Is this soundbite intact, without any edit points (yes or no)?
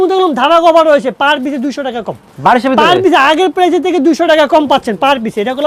yes